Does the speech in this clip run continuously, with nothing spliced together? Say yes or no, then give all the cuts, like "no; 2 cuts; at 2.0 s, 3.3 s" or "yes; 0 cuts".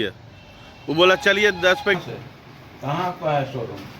no; 1 cut; at 2.0 s